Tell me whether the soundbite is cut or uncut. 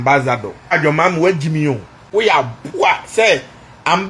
cut